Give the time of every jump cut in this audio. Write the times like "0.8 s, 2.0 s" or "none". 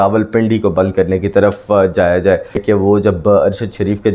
2.6 s